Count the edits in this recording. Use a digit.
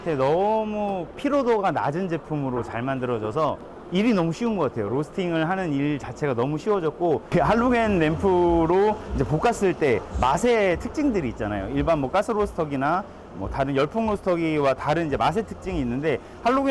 2